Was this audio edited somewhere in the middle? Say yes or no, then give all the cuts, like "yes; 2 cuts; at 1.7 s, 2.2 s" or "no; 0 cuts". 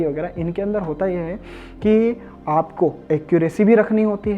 no; 0 cuts